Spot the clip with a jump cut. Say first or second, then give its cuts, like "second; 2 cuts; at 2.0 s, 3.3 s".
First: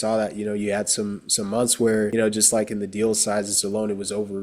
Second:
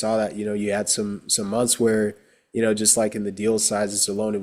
first; 1 cut; at 2.1 s